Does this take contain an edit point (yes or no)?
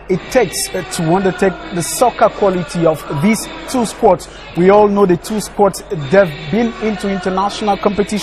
yes